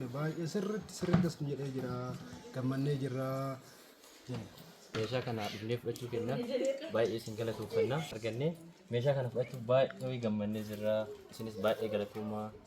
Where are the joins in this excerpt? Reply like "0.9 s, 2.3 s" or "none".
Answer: 4.9 s, 8.1 s